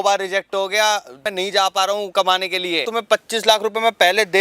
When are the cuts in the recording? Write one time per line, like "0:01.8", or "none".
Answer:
0:01.2
0:02.9